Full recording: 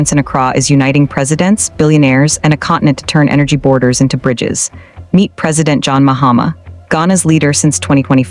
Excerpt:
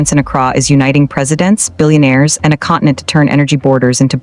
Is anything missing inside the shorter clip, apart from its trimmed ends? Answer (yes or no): no